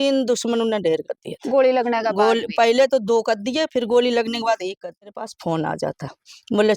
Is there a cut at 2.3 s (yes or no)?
no